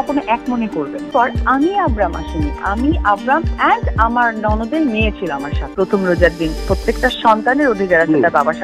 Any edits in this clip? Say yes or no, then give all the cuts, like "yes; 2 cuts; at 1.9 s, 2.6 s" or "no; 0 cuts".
yes; 2 cuts; at 1.0 s, 5.7 s